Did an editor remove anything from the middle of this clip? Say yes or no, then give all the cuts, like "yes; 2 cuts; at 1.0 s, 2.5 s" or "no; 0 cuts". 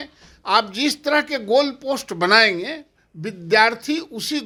no; 0 cuts